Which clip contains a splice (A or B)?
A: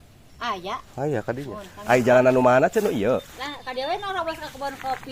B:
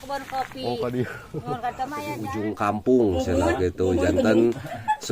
B